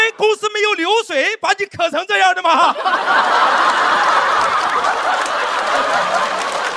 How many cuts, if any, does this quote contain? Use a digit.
0